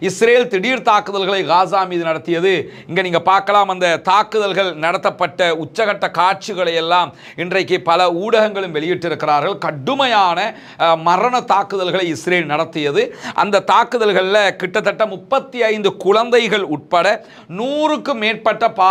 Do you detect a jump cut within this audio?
no; 0 cuts

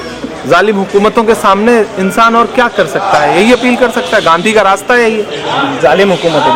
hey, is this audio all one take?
yes; 0 cuts

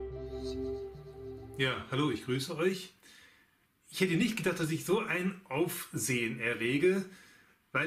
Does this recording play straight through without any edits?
yes; 0 cuts

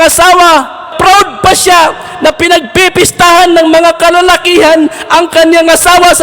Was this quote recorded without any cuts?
no; 1 cut; at 0.9 s

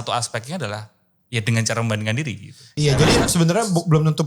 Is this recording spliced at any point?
yes; 1 cut; at 2.6 s

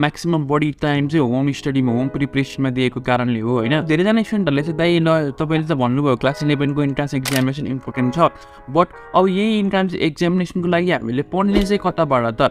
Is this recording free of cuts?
yes; 0 cuts

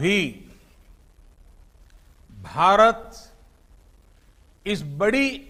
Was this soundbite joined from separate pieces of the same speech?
no; 0 cuts

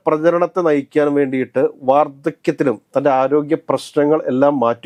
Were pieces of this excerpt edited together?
no; 0 cuts

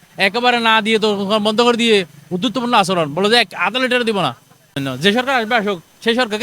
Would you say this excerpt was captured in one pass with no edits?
no; 1 cut; at 4.8 s

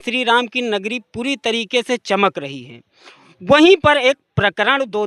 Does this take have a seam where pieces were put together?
no; 0 cuts

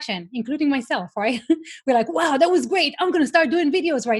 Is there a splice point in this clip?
no; 0 cuts

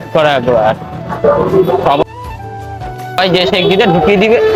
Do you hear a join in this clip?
no; 0 cuts

